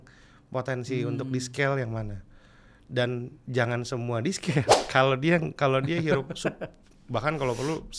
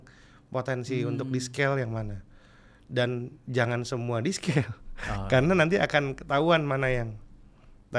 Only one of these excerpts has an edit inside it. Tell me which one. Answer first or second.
first